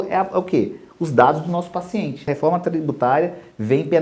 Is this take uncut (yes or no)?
no